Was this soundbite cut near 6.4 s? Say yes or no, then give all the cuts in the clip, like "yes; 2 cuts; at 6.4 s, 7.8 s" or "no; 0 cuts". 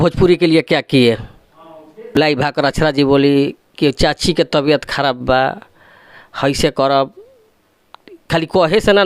no; 1 cut; at 2.1 s